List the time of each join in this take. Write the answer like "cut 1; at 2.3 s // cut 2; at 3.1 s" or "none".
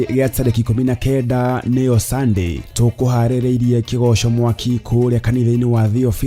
none